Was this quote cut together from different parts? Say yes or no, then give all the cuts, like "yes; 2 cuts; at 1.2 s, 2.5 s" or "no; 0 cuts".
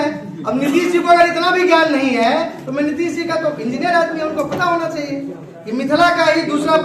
no; 0 cuts